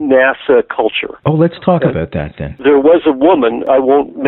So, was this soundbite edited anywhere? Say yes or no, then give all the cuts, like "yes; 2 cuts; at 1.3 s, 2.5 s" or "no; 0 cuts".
no; 0 cuts